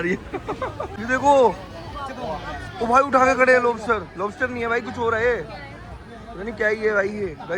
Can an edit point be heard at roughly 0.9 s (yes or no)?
yes